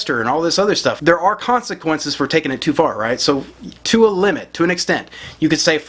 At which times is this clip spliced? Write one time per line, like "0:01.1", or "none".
0:01.0